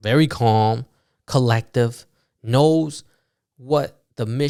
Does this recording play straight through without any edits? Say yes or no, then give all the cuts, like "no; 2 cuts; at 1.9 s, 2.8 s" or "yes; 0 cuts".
yes; 0 cuts